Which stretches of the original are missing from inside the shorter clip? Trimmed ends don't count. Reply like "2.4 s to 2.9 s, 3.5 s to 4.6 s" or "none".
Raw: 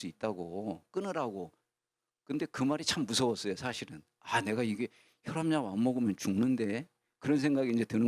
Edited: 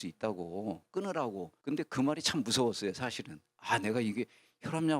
1.5 s to 2.2 s